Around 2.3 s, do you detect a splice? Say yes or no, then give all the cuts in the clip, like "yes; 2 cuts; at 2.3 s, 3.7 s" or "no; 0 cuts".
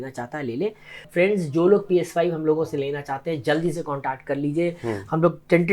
no; 1 cut; at 1.1 s